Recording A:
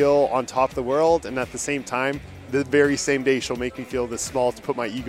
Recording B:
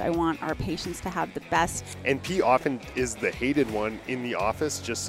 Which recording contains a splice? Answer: B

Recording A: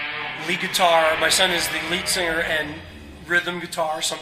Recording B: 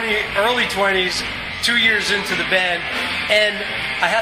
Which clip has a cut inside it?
A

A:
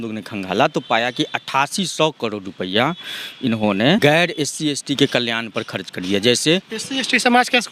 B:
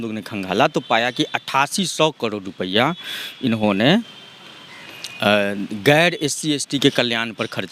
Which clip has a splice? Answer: A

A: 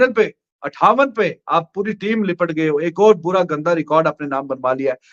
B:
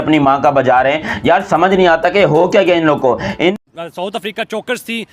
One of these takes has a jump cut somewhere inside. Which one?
B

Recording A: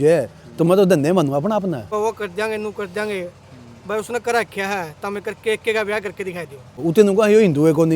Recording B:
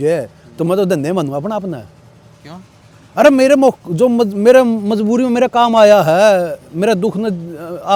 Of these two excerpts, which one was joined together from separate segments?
A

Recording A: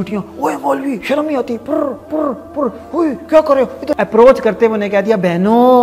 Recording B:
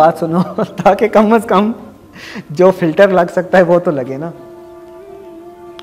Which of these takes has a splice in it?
A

